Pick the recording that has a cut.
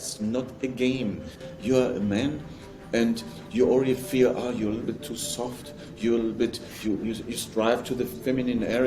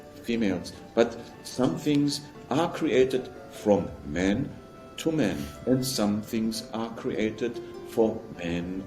first; 1 cut; at 1.4 s

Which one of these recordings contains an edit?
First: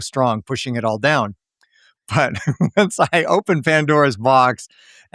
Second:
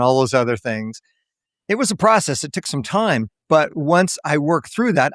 second; 1 cut; at 3.3 s

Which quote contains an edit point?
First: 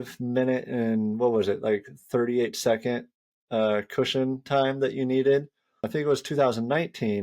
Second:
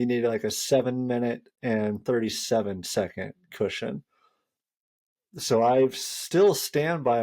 first; 1 cut; at 5.9 s

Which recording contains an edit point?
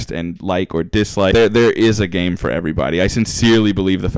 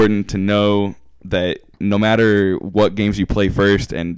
first; 1 cut; at 1.3 s

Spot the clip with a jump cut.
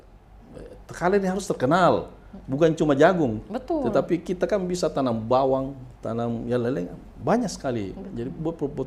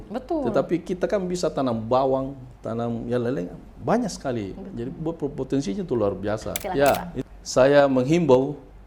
second; 1 cut; at 6.5 s

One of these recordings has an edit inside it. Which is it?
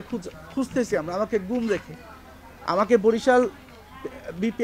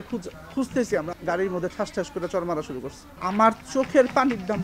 second; 2 cuts; at 1.1 s, 3.0 s

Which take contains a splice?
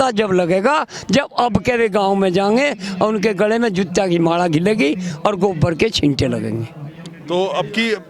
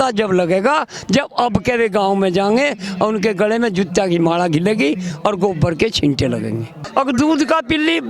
second; 1 cut; at 6.7 s

